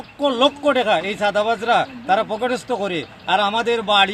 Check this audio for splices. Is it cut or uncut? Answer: uncut